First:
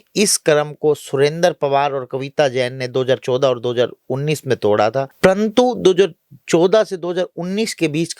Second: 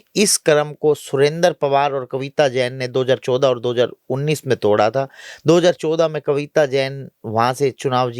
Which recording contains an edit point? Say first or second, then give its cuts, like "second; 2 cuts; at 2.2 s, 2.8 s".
first; 1 cut; at 5.1 s